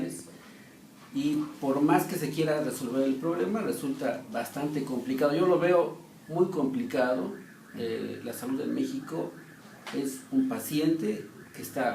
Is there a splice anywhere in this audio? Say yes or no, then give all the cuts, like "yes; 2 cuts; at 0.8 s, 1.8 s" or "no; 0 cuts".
yes; 1 cut; at 3.4 s